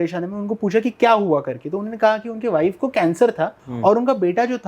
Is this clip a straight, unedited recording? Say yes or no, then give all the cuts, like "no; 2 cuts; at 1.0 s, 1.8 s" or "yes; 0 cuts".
no; 1 cut; at 3.6 s